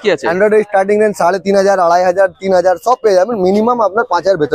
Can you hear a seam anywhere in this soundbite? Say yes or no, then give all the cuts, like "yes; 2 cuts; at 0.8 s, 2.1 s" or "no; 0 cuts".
no; 0 cuts